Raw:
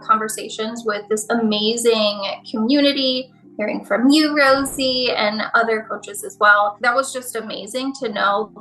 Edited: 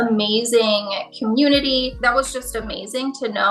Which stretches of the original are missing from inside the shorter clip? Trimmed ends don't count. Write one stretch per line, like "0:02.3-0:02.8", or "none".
0:03.3-0:06.8